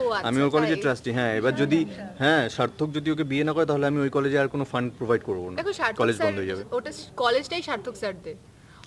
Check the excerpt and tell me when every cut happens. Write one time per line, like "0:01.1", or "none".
none